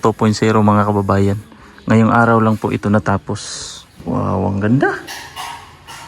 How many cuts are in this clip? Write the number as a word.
one